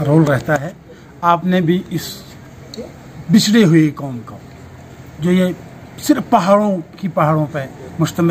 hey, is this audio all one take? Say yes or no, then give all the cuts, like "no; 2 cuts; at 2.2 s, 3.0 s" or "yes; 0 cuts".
yes; 0 cuts